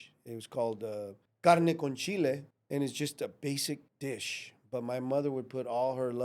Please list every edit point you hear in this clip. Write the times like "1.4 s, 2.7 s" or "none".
1.2 s, 2.5 s, 3.9 s